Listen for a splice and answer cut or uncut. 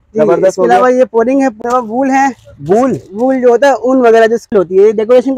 cut